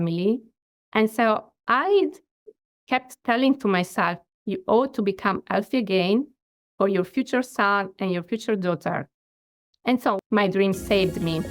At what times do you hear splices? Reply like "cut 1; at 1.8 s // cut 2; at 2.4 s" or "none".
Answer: cut 1; at 4.2 s // cut 2; at 10.2 s